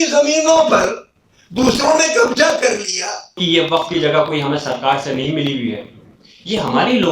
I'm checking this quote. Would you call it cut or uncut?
cut